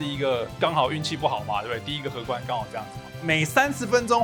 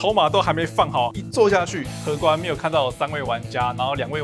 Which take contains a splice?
second; 2 cuts; at 1.1 s, 1.9 s

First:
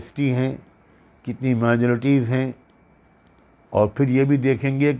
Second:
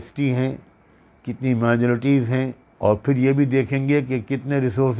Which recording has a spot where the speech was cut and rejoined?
second; 1 cut; at 2.6 s

